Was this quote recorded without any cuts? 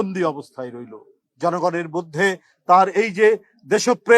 no; 1 cut; at 1.5 s

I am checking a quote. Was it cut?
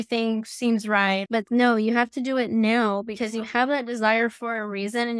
yes; 1 cut; at 1.4 s

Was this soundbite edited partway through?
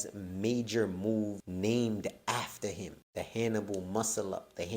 yes; 2 cuts; at 1.4 s, 3.0 s

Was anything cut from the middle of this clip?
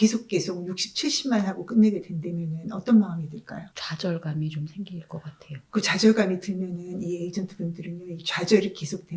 no; 0 cuts

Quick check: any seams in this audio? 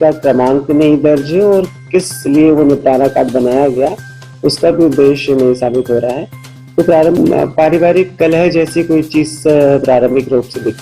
yes; 1 cut; at 7.1 s

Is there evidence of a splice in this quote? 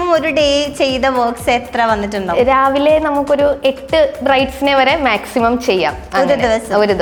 no; 0 cuts

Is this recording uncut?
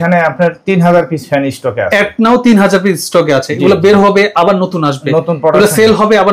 yes; 0 cuts

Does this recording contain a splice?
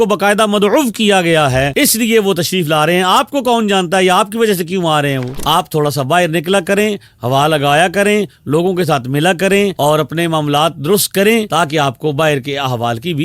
yes; 1 cut; at 5.3 s

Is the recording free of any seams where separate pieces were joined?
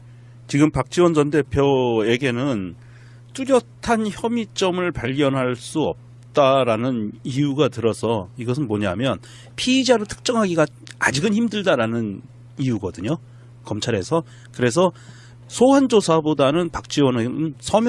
yes; 0 cuts

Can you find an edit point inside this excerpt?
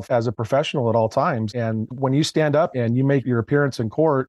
yes; 2 cuts; at 1.5 s, 2.7 s

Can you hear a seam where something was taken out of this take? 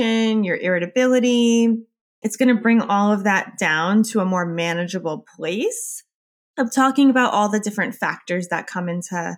yes; 1 cut; at 6.3 s

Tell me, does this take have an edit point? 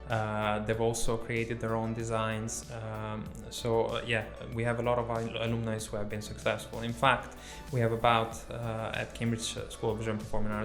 no; 0 cuts

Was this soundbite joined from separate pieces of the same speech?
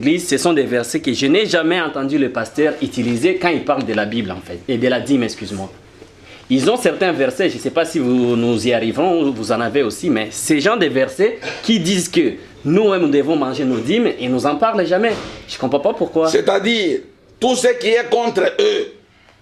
no; 0 cuts

